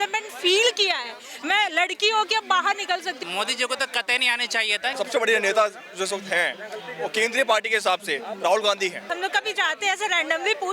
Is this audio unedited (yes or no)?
no